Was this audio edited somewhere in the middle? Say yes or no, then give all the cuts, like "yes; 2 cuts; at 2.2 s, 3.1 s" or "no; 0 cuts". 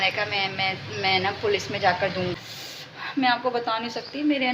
yes; 1 cut; at 2.3 s